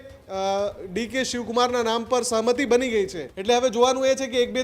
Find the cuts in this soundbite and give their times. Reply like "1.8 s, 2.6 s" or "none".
3.3 s